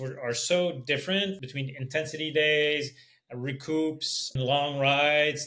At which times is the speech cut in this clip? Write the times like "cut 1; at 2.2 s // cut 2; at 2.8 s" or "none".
cut 1; at 1.3 s // cut 2; at 4.4 s